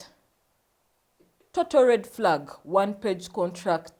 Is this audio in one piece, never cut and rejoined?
yes; 0 cuts

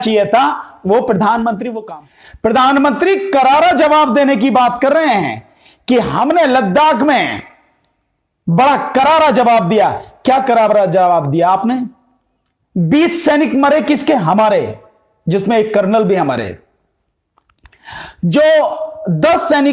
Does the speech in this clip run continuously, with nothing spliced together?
no; 1 cut; at 1.7 s

